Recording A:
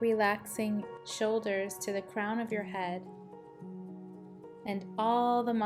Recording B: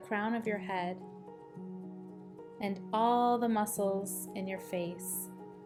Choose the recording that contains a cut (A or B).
A